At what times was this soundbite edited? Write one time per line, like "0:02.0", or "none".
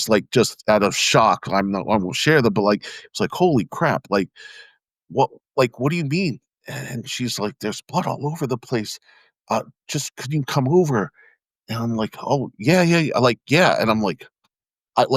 none